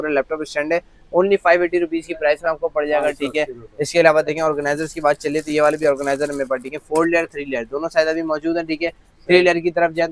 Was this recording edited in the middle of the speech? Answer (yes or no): no